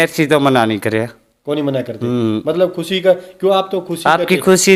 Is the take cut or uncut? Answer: uncut